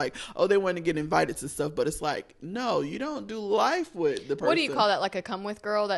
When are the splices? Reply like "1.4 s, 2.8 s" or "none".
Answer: none